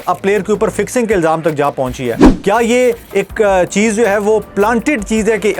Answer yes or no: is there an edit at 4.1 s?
no